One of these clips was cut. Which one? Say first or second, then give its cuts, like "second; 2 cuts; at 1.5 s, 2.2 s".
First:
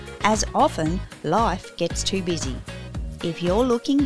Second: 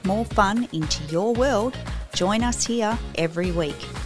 second; 1 cut; at 2.6 s